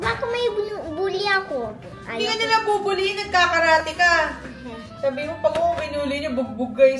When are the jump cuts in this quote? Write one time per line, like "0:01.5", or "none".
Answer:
none